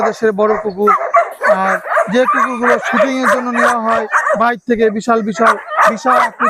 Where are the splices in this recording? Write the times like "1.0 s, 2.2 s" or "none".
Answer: none